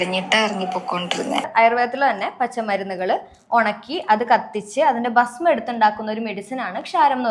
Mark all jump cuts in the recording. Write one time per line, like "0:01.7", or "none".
0:01.5